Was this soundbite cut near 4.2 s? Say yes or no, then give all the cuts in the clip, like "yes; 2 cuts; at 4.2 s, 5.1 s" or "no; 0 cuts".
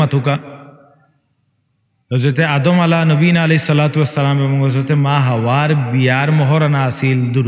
no; 0 cuts